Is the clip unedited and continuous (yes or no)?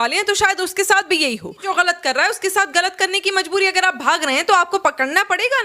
no